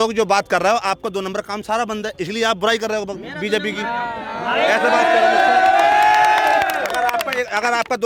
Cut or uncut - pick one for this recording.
uncut